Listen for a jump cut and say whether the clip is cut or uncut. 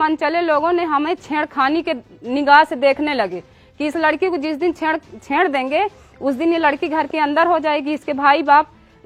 uncut